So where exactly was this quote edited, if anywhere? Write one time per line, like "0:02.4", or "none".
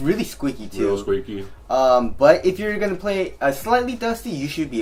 none